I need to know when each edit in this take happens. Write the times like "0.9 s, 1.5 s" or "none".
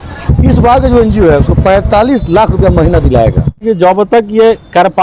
3.6 s